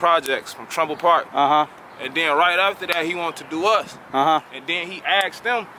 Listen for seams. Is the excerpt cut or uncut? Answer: uncut